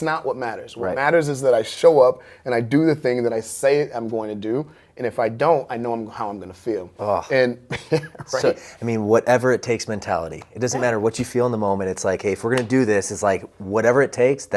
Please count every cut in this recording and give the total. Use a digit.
0